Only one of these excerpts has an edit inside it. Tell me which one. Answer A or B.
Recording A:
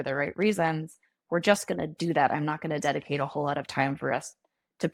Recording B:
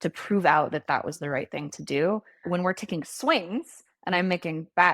B